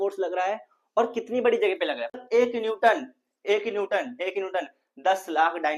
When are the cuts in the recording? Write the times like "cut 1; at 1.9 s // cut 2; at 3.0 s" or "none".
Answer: cut 1; at 2.1 s